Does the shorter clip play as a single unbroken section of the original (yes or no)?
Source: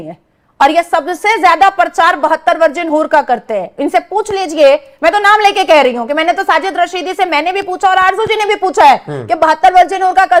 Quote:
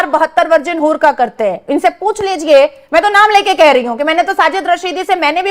yes